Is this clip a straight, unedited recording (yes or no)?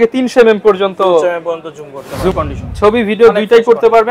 no